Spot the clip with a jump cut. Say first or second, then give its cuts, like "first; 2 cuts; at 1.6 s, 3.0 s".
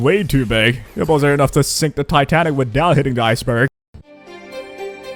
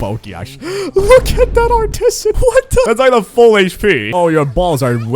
second; 2 cuts; at 2.9 s, 4.1 s